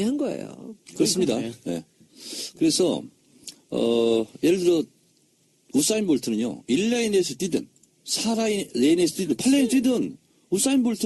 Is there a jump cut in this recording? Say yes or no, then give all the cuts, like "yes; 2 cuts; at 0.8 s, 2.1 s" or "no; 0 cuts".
no; 0 cuts